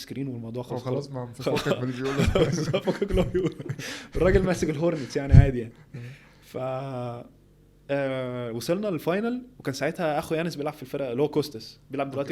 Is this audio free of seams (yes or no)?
yes